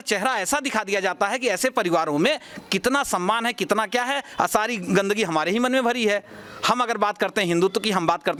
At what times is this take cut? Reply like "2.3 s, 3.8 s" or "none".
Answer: none